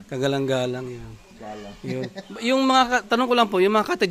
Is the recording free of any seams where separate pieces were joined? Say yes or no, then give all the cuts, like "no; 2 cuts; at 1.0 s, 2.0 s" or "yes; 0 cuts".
yes; 0 cuts